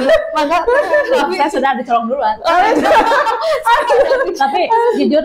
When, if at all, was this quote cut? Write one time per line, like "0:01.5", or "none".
none